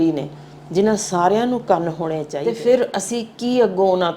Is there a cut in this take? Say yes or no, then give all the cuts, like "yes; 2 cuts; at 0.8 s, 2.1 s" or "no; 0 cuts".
yes; 1 cut; at 2.4 s